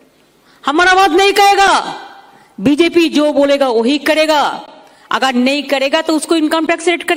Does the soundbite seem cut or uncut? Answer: uncut